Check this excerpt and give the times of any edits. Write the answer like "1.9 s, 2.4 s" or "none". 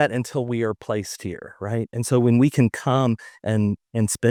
none

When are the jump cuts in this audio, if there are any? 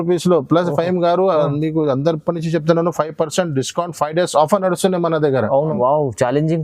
5.7 s

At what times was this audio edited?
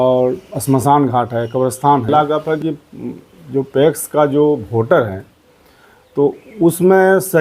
2.1 s

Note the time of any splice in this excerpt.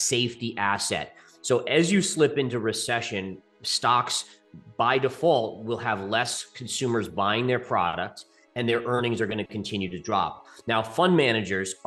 none

